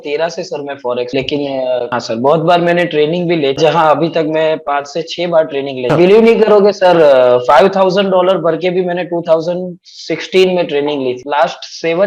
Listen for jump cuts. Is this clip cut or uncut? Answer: cut